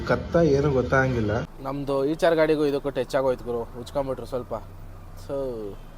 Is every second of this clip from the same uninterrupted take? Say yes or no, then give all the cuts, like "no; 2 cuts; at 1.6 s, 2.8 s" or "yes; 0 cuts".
no; 1 cut; at 1.6 s